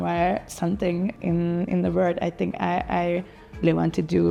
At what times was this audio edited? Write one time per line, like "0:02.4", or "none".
none

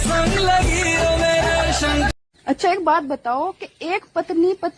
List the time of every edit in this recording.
0:02.3

